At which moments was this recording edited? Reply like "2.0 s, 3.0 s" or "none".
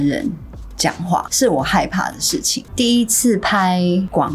1.3 s, 2.6 s